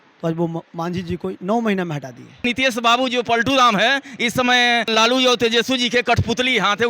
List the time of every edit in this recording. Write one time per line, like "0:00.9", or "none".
0:02.4
0:04.9